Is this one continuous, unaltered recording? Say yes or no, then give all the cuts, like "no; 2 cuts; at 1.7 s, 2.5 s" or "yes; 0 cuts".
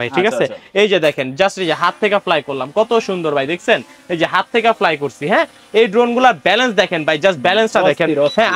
yes; 0 cuts